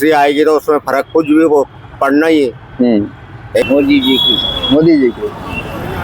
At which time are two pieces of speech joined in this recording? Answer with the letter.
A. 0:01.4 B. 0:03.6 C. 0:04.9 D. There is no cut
B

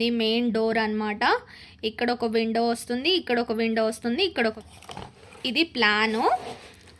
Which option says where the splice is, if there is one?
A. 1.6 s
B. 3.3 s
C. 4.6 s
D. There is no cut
C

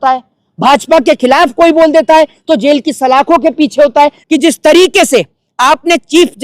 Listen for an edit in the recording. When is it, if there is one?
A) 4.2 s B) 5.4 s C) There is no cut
A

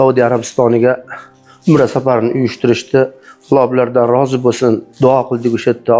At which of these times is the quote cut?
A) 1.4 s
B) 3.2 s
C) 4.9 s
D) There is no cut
C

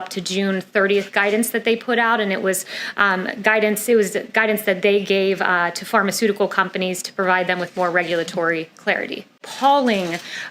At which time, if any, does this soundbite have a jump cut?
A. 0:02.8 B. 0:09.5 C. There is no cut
B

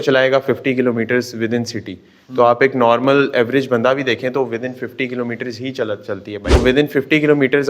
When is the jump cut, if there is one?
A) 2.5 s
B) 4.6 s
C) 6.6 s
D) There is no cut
C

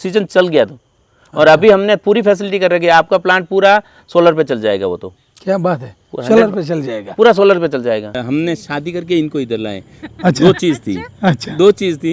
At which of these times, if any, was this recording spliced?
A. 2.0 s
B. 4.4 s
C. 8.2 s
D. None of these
C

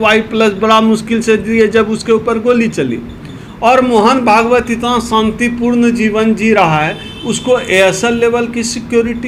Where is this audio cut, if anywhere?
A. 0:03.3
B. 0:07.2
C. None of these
C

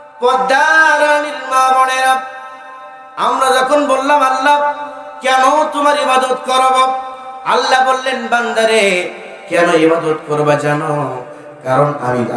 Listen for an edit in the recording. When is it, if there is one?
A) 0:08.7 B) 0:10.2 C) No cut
C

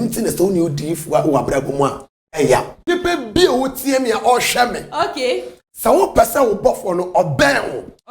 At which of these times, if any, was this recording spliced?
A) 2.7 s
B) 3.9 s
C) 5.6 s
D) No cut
A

